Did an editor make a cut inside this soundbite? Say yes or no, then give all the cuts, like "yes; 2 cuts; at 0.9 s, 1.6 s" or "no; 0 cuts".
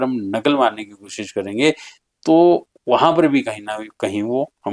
no; 0 cuts